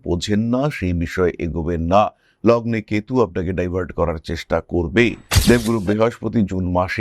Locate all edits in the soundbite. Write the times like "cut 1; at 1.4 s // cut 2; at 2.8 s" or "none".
cut 1; at 5.3 s